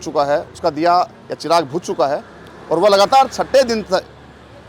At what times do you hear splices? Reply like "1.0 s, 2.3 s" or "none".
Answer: none